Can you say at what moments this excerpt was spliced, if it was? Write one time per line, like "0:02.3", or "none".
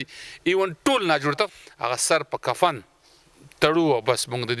0:01.5